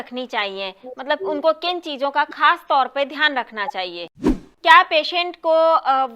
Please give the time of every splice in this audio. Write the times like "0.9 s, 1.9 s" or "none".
4.4 s